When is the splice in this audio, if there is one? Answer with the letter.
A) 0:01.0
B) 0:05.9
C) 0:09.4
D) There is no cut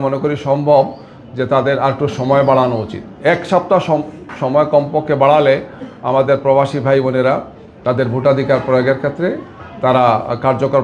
D